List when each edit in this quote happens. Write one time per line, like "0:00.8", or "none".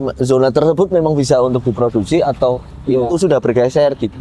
none